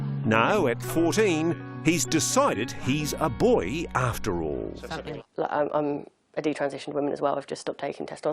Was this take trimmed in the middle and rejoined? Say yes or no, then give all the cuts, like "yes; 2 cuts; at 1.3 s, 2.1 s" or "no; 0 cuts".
yes; 1 cut; at 5.1 s